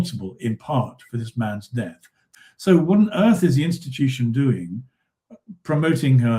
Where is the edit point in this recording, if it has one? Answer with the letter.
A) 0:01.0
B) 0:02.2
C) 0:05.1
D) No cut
B